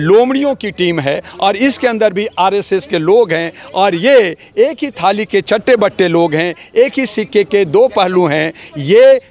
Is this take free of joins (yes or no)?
yes